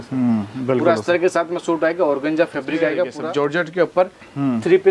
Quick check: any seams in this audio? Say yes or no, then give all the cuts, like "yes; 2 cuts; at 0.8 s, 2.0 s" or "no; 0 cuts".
yes; 1 cut; at 3.2 s